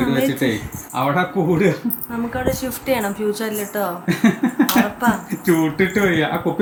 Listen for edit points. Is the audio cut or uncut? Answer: uncut